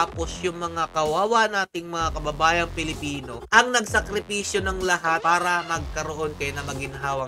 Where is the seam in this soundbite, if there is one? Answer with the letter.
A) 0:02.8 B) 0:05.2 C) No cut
B